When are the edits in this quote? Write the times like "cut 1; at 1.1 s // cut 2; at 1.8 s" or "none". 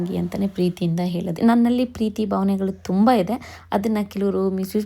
cut 1; at 1.3 s